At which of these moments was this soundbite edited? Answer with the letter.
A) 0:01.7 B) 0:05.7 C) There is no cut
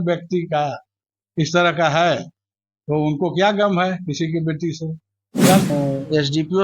B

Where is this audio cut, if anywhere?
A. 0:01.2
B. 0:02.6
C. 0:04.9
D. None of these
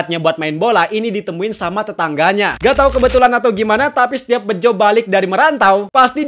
B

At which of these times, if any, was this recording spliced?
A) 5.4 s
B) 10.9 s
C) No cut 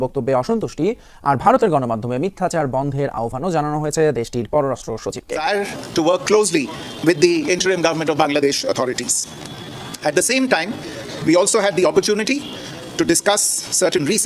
A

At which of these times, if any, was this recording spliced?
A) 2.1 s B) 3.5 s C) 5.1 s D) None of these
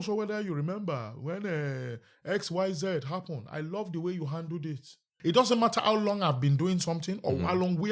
C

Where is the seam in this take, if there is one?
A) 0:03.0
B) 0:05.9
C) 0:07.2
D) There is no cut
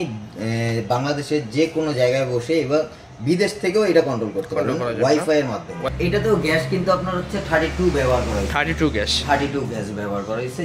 B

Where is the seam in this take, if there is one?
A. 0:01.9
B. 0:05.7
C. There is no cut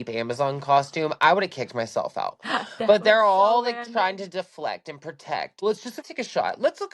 B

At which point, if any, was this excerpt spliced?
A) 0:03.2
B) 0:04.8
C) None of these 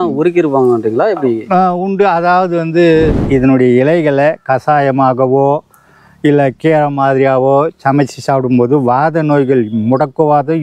A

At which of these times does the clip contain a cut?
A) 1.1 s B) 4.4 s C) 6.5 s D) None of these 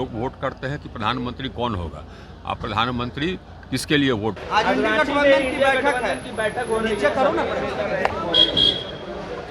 B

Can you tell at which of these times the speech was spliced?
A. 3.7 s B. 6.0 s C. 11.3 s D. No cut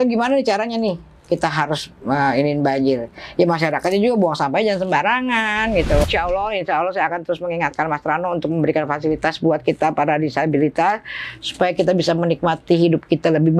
B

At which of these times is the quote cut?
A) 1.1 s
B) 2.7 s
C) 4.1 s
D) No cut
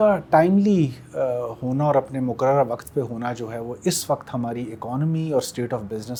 D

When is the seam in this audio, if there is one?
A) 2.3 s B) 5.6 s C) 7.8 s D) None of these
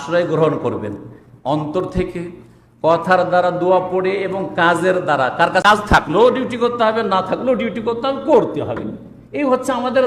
B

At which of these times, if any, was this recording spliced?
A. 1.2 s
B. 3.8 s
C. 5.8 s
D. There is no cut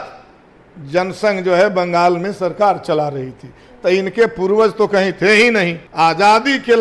C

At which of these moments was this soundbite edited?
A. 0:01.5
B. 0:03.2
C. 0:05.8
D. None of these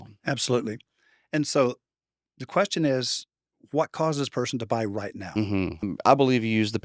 C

